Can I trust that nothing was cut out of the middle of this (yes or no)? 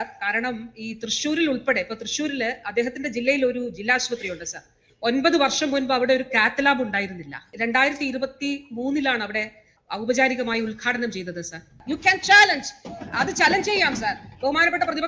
no